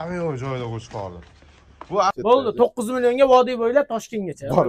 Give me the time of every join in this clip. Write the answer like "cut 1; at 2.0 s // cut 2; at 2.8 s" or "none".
cut 1; at 2.1 s